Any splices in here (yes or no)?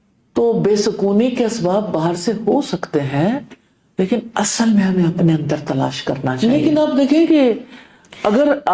yes